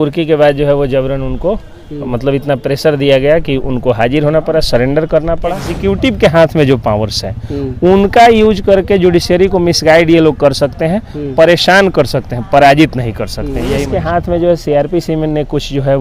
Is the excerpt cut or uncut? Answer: cut